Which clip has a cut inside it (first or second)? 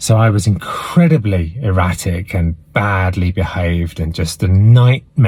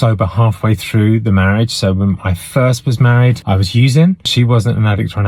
second